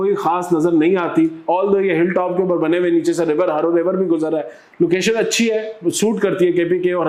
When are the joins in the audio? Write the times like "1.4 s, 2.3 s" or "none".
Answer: none